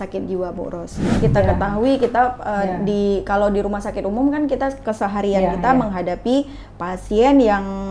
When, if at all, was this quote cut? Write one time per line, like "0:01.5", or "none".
0:01.2